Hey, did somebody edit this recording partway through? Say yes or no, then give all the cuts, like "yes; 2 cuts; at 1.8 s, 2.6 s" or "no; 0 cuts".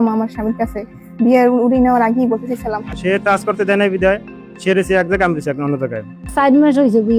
yes; 2 cuts; at 2.9 s, 6.1 s